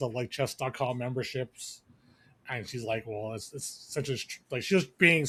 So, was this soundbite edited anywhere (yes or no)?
no